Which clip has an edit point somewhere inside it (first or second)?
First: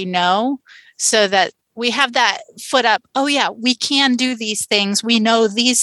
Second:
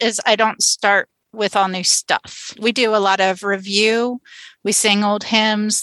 first